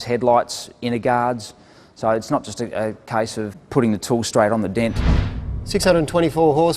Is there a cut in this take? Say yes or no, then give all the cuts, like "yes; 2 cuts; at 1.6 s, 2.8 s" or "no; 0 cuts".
yes; 1 cut; at 5.1 s